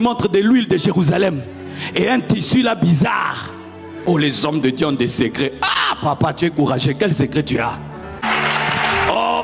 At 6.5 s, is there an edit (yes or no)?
no